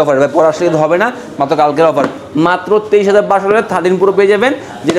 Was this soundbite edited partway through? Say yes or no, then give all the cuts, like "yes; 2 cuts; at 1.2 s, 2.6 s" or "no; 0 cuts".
yes; 1 cut; at 2.2 s